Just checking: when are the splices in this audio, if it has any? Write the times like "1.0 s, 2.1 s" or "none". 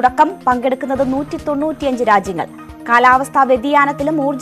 none